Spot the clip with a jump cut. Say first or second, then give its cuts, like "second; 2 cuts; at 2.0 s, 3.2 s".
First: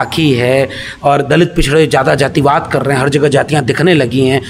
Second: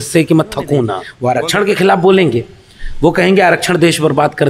second; 1 cut; at 1.1 s